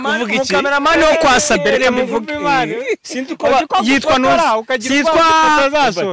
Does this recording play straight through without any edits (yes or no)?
yes